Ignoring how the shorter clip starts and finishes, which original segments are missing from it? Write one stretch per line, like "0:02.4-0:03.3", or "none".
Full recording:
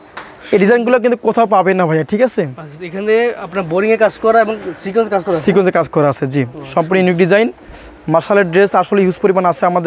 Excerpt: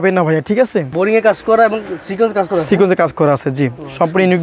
0:02.5-0:03.7

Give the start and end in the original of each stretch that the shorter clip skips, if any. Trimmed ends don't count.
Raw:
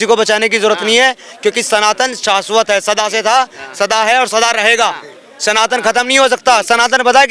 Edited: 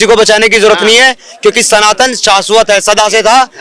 none

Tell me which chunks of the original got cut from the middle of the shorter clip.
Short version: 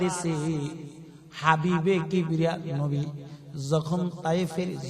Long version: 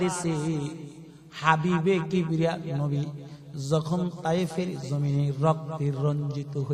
none

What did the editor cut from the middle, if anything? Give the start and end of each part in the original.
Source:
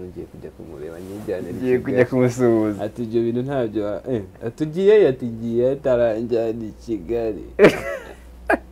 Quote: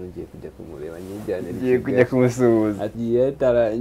0:02.9-0:05.3

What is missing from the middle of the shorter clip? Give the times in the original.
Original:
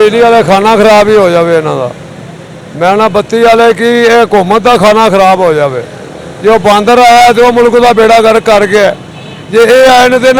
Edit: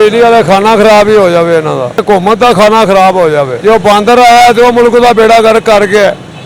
0:02.0-0:04.3
0:05.8-0:06.3

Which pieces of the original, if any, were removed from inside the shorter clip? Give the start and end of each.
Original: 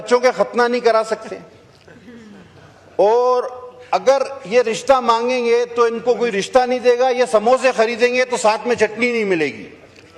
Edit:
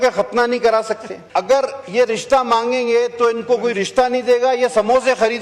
0:01.4-0:03.7

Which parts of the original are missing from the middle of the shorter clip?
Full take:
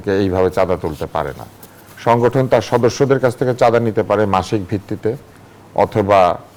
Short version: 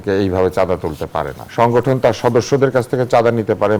0:01.4-0:01.9

